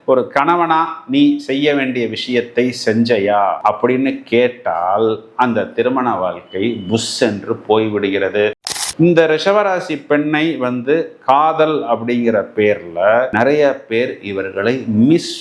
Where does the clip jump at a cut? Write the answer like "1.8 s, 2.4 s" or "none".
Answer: 8.8 s